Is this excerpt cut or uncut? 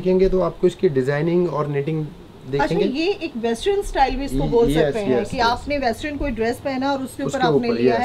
uncut